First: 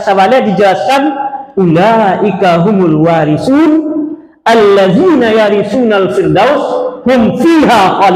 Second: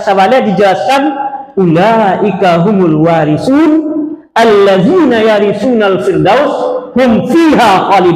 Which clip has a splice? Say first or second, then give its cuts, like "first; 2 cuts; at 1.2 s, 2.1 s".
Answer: second; 1 cut; at 4.2 s